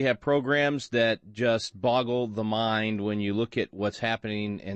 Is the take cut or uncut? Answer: cut